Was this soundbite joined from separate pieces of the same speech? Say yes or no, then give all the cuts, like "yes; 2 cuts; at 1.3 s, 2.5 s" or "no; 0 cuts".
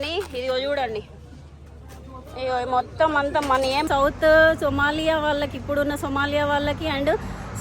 yes; 1 cut; at 3.8 s